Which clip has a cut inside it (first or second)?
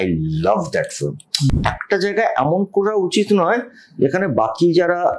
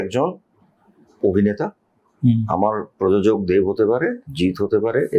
first